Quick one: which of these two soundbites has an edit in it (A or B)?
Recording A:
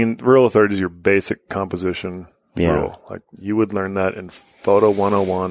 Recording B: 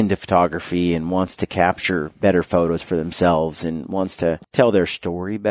B